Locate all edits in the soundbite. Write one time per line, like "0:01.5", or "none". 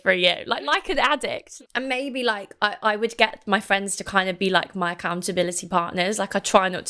0:01.6